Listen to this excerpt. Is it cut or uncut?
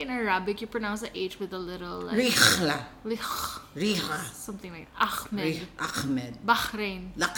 uncut